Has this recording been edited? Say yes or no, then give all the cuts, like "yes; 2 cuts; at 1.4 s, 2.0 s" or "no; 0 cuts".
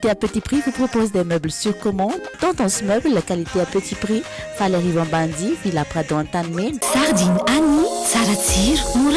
yes; 1 cut; at 6.8 s